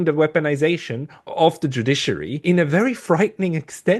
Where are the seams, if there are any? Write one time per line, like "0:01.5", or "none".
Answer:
0:01.2
0:02.4